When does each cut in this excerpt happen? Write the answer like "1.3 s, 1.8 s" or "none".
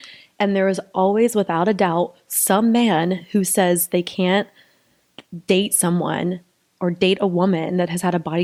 none